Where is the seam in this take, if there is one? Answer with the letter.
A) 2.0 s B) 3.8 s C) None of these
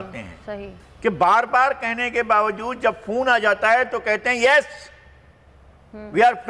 C